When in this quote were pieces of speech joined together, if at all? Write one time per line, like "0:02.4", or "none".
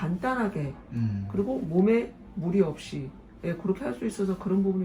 none